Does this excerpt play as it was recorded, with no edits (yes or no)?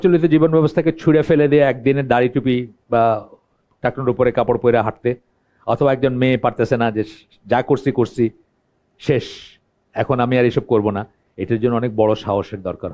yes